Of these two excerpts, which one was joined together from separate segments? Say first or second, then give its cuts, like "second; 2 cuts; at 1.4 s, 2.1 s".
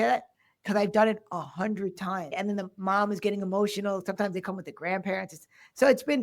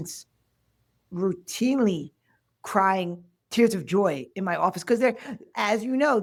first; 1 cut; at 2.3 s